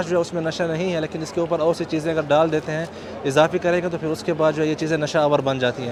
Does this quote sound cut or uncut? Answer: uncut